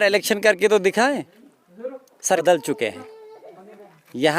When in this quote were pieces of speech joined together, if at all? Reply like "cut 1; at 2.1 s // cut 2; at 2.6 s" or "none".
cut 1; at 2.4 s